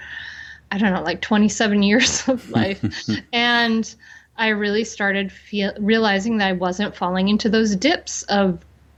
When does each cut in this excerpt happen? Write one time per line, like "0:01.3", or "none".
none